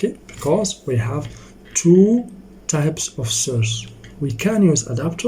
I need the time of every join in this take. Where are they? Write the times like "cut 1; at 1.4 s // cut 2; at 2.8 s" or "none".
none